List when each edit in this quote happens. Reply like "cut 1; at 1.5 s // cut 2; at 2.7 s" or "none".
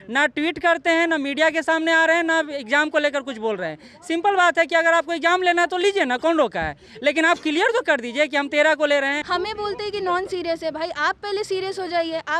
cut 1; at 9.3 s